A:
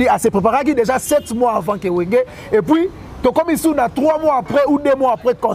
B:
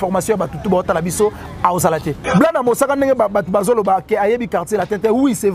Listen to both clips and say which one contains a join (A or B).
B